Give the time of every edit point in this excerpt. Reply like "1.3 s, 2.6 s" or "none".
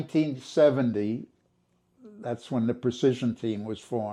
none